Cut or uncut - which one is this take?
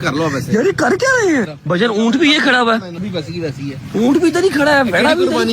cut